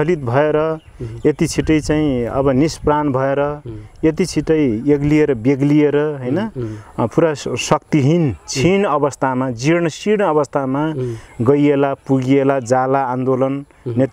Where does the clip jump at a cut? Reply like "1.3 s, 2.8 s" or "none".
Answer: none